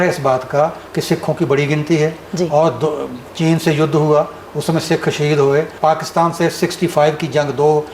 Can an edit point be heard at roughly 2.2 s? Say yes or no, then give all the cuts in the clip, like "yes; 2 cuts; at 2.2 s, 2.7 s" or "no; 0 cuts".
no; 1 cut; at 5.7 s